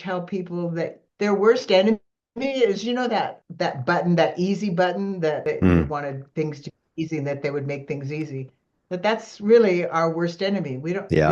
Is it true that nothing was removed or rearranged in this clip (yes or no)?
no